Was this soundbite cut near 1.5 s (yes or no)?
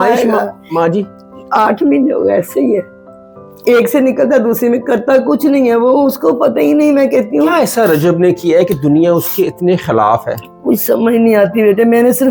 no